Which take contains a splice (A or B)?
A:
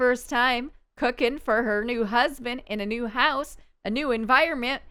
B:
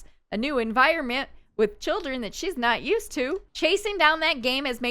B